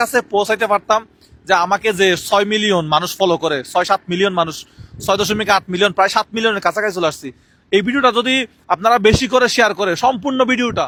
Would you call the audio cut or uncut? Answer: uncut